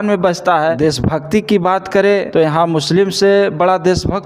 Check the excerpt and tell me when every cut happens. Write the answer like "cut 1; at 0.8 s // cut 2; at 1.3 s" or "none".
cut 1; at 0.8 s // cut 2; at 2.3 s